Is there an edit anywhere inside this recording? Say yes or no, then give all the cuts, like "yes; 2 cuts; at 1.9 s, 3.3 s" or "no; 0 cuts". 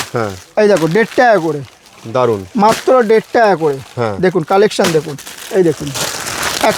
no; 0 cuts